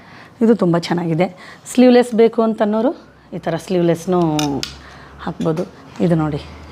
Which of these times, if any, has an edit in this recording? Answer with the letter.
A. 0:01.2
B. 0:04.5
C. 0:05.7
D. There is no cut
D